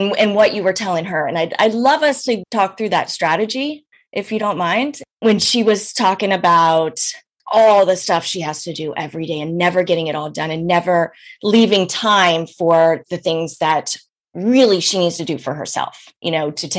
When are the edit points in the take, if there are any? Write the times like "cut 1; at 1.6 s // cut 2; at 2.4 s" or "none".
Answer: cut 1; at 5.1 s